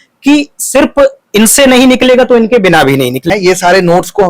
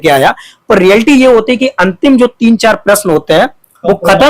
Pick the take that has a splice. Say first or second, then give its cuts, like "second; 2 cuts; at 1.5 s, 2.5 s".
first; 1 cut; at 3.3 s